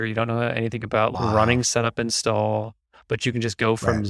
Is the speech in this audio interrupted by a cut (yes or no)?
yes